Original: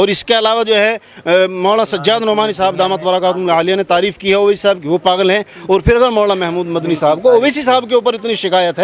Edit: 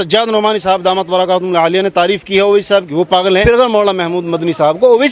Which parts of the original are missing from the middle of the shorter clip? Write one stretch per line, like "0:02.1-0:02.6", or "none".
0:05.4-0:05.8